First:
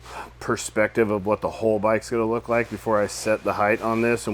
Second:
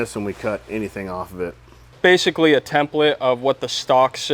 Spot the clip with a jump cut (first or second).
second